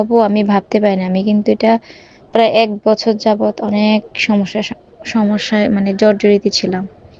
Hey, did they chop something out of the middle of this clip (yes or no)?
no